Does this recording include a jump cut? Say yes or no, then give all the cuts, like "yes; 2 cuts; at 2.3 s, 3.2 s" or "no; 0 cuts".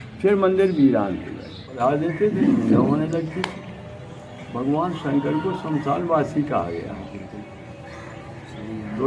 yes; 1 cut; at 1.7 s